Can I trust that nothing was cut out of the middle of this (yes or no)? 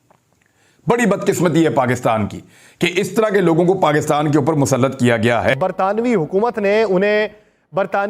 no